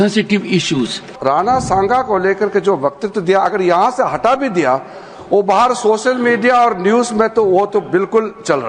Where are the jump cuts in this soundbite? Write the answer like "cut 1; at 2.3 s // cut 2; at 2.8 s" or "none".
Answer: cut 1; at 1.0 s